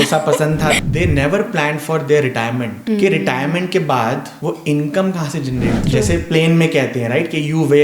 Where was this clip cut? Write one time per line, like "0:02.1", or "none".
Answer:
0:00.8
0:02.7
0:04.3
0:05.8